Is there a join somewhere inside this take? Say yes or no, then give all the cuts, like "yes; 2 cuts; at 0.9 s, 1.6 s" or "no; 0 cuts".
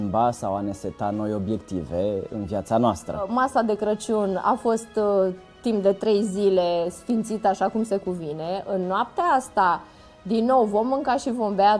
yes; 1 cut; at 3.3 s